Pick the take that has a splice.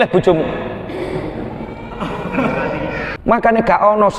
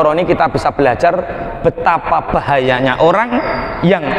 first; 1 cut; at 3.1 s

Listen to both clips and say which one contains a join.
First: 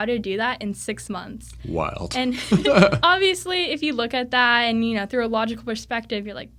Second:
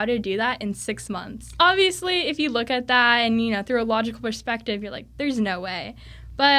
second; 1 cut; at 1.6 s

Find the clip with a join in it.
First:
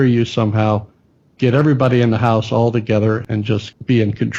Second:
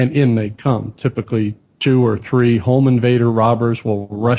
first; 1 cut; at 3.2 s

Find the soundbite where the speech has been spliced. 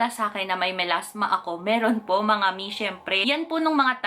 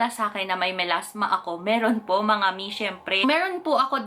first; 1 cut; at 3.1 s

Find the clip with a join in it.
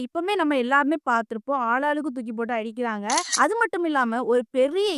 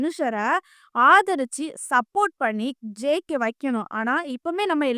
first; 1 cut; at 3.3 s

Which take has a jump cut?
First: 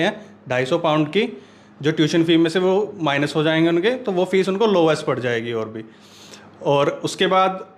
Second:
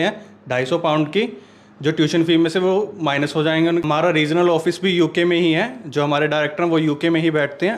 second; 1 cut; at 3.8 s

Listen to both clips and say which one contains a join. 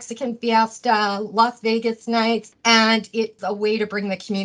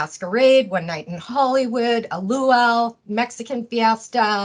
first; 2 cuts; at 2.5 s, 3.4 s

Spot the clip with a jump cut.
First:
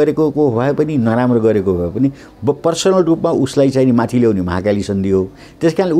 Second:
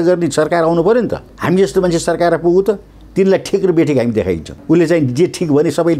second; 2 cuts; at 1.3 s, 4.5 s

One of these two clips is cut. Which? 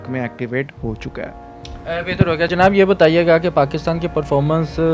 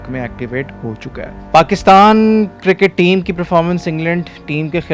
second; 1 cut; at 1.4 s

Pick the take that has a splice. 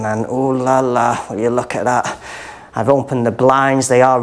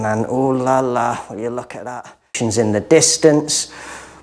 second; 1 cut; at 2.3 s

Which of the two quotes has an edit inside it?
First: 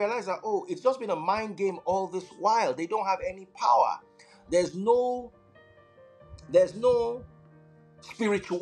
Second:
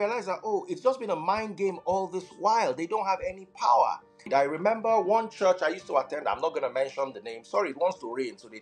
second; 1 cut; at 4.3 s

